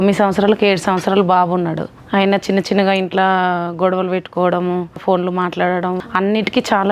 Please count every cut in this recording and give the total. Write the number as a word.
three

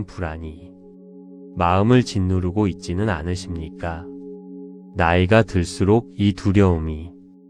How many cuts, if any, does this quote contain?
zero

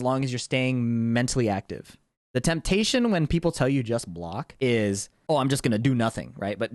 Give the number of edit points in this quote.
two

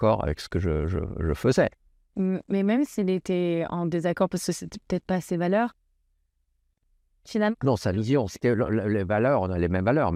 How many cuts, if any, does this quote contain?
zero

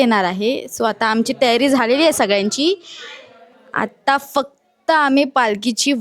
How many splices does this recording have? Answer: zero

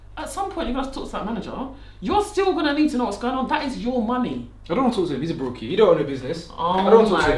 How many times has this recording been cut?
zero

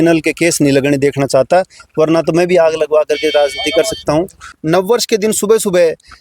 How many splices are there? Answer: one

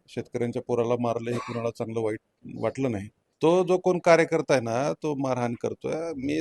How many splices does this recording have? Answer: one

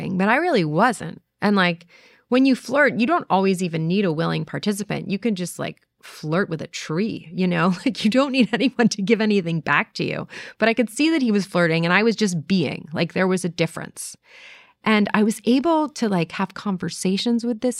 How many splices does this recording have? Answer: zero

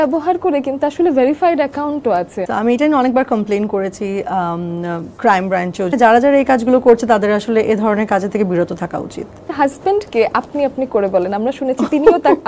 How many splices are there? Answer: three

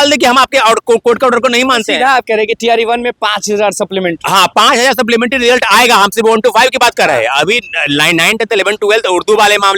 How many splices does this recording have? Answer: zero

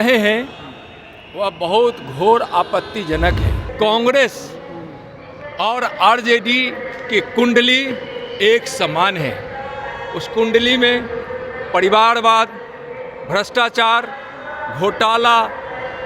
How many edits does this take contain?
one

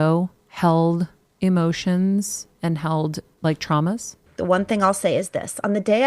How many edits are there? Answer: one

